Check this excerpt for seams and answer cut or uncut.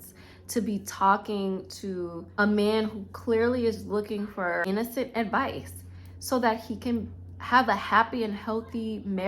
cut